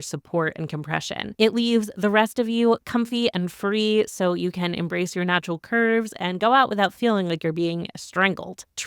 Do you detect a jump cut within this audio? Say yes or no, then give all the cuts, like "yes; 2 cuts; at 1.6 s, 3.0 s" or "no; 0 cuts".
yes; 1 cut; at 1.2 s